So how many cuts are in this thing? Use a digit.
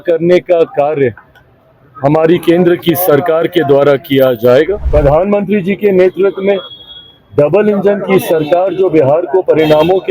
1